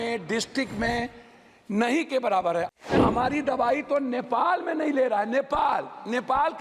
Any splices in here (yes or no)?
yes